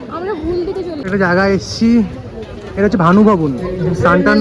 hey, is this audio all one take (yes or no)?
yes